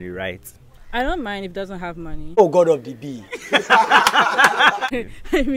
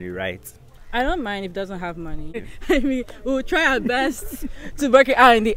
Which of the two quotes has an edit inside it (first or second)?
second